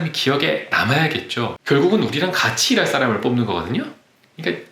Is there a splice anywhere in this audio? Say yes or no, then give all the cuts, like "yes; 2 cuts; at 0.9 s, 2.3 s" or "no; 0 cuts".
yes; 1 cut; at 1.6 s